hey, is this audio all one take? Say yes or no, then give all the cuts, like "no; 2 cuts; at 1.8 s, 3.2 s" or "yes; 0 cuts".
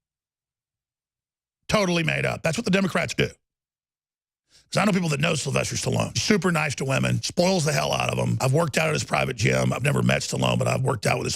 no; 3 cuts; at 6.2 s, 7.2 s, 8.3 s